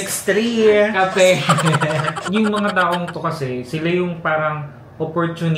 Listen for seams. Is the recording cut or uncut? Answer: cut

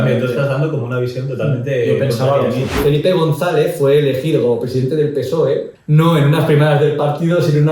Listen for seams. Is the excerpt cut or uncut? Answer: cut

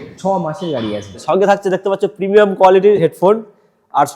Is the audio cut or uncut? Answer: cut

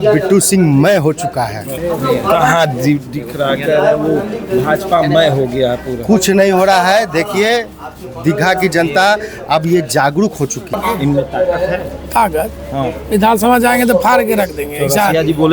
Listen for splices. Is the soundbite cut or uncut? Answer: cut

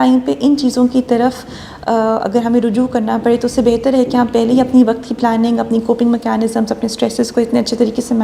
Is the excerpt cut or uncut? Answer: uncut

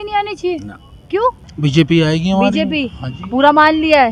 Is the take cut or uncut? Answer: cut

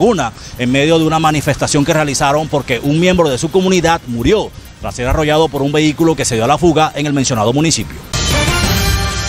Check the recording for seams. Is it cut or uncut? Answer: cut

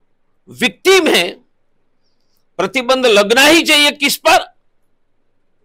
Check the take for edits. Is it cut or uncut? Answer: uncut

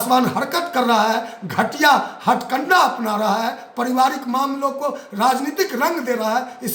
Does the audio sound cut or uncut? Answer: uncut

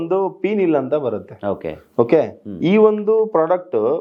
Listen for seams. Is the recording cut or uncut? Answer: uncut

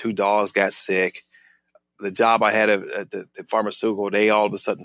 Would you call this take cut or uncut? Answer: uncut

